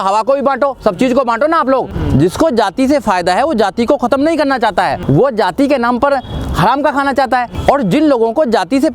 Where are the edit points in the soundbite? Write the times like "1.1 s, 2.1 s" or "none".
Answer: 2.0 s, 5.0 s, 7.5 s

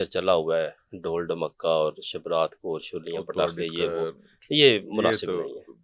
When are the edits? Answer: none

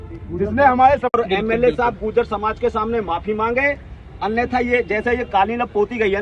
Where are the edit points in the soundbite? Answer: 1.1 s

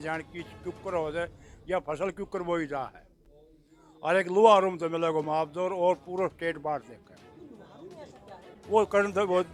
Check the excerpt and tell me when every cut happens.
none

